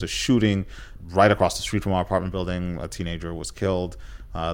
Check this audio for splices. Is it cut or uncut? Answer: cut